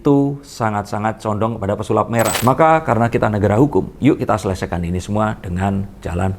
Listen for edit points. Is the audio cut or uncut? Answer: cut